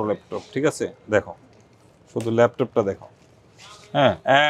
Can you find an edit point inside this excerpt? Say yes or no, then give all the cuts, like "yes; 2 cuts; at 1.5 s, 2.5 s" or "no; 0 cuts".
no; 0 cuts